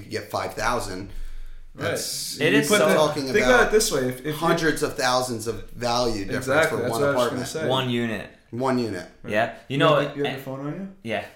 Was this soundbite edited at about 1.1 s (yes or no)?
no